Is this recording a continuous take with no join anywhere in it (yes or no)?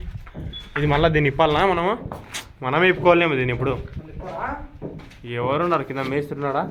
yes